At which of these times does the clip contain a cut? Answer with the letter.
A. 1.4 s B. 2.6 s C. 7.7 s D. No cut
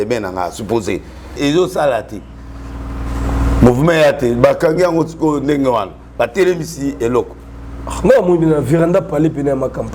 A